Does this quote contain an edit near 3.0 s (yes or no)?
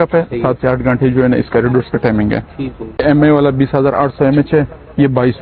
yes